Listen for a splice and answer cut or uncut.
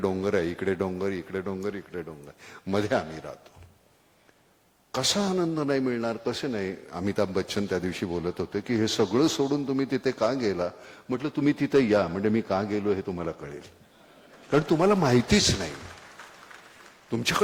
uncut